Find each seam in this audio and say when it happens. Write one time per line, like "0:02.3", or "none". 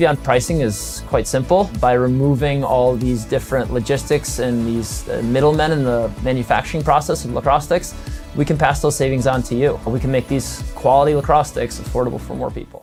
none